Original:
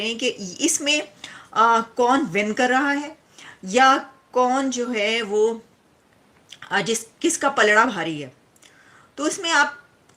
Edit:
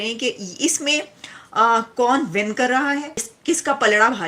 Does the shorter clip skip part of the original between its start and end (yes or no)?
yes